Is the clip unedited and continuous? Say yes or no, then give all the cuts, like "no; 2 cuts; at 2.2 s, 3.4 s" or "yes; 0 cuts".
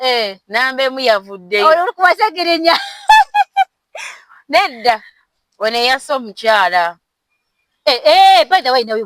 yes; 0 cuts